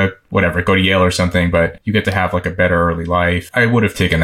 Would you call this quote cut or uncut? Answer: cut